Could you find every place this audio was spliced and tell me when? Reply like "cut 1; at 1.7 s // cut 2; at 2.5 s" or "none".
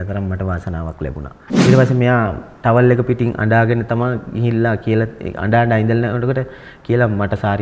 cut 1; at 1.5 s